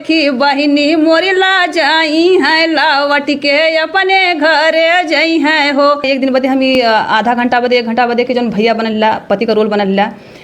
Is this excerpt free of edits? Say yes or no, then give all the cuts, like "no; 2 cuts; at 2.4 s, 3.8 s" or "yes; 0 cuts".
no; 1 cut; at 6.0 s